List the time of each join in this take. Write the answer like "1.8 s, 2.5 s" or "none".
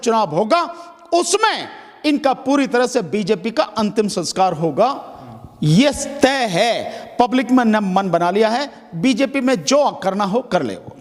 none